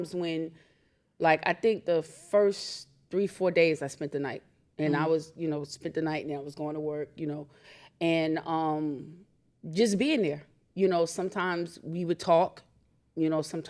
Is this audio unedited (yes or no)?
yes